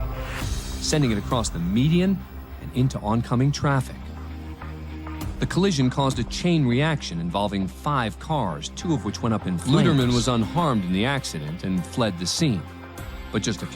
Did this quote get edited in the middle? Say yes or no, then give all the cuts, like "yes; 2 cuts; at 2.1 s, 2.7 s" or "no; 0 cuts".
yes; 1 cut; at 9.6 s